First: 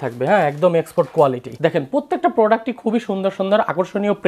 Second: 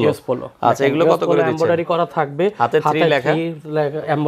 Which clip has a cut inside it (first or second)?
first